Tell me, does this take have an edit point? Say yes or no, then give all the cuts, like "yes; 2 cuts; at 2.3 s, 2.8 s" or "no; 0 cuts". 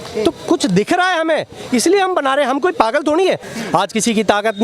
yes; 1 cut; at 3.5 s